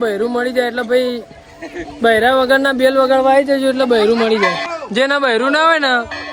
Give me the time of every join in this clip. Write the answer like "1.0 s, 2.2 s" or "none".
4.7 s